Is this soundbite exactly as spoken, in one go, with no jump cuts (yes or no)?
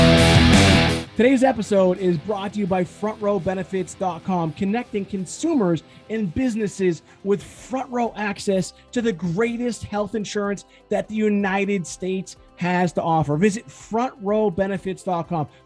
no